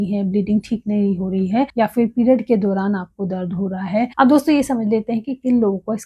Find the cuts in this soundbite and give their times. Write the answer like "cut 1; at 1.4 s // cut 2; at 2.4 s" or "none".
cut 1; at 1.7 s // cut 2; at 4.1 s